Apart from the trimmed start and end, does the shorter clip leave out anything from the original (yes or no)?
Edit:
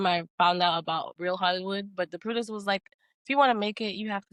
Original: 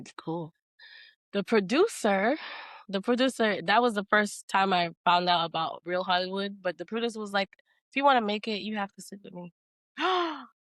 no